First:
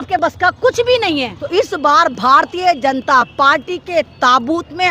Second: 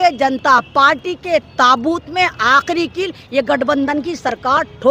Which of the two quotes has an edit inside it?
first; 1 cut; at 1.4 s

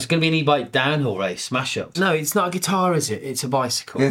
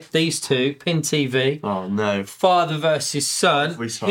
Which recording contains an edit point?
first; 1 cut; at 1.9 s

